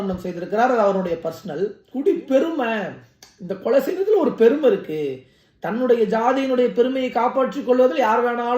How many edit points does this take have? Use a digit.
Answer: 1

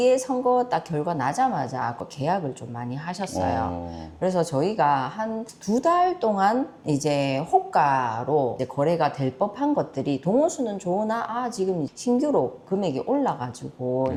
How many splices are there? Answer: 0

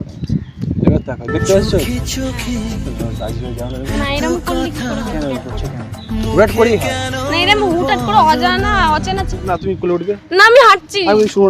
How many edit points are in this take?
1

